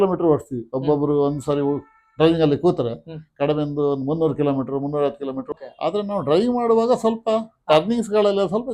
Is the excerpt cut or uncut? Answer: cut